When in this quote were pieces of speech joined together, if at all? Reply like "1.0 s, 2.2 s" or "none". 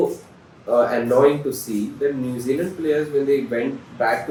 none